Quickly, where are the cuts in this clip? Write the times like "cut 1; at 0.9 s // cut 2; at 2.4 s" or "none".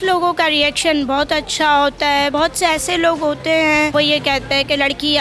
cut 1; at 2.3 s // cut 2; at 3.9 s